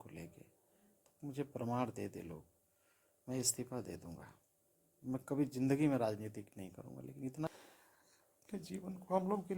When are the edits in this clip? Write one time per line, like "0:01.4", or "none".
0:07.5